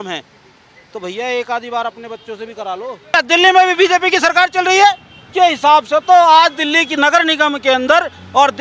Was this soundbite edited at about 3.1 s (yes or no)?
yes